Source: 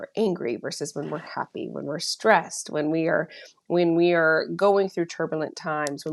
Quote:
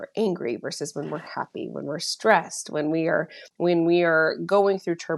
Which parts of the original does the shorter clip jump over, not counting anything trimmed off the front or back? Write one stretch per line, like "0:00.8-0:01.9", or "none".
0:03.4-0:03.5